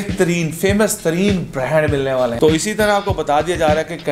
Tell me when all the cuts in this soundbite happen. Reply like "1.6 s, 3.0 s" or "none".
2.3 s